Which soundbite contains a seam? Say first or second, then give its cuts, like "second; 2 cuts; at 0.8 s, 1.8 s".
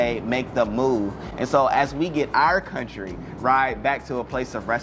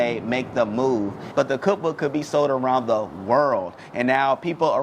second; 1 cut; at 1.2 s